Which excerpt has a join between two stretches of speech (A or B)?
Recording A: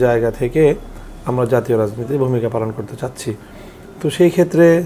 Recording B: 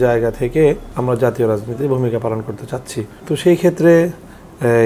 B